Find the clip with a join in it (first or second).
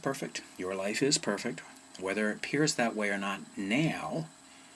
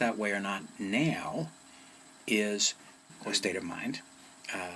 second